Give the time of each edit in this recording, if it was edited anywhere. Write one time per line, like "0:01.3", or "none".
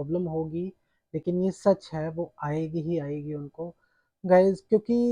none